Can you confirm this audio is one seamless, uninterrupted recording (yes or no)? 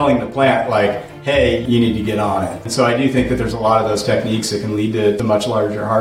no